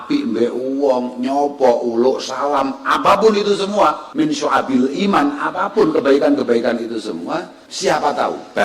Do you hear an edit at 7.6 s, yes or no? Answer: yes